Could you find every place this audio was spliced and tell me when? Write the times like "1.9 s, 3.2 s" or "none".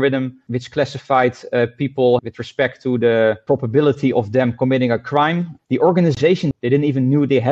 2.2 s, 5.5 s, 6.5 s